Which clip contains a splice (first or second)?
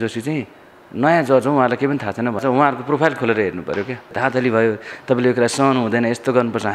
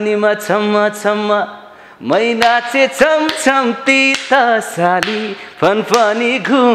first